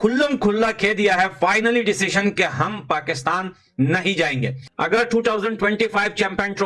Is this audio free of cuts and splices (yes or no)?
yes